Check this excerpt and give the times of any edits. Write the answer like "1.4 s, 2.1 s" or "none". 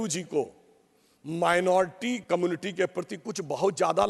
2.2 s